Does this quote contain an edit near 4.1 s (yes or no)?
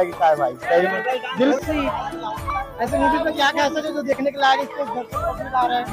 no